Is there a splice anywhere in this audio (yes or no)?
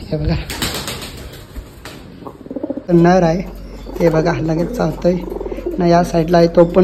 yes